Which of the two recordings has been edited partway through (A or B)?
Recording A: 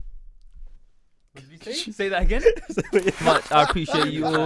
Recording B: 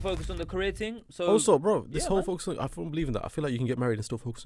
A